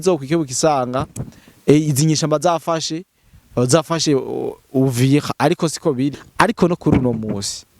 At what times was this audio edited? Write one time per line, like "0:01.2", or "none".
0:06.2